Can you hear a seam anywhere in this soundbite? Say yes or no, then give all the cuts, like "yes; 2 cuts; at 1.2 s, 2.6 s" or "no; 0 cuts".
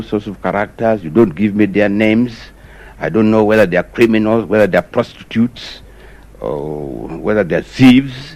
no; 0 cuts